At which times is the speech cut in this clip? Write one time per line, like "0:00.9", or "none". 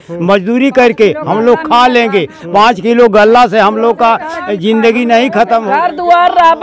0:05.7